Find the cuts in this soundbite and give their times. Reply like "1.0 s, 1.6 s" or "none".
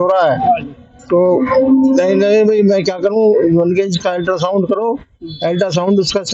none